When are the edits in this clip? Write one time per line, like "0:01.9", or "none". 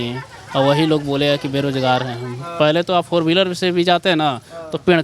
0:02.5